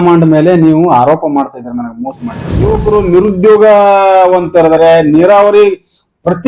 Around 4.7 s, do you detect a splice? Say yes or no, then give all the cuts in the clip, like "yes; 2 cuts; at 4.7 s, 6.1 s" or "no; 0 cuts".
no; 1 cut; at 2.7 s